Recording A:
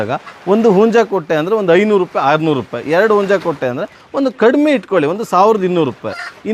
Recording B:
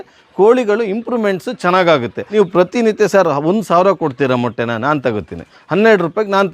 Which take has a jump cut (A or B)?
B